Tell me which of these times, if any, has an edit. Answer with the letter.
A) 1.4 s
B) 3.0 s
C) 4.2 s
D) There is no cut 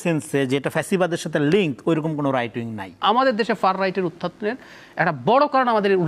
B